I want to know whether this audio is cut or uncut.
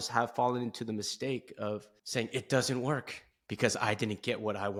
uncut